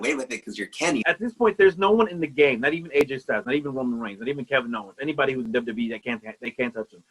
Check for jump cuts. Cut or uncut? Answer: cut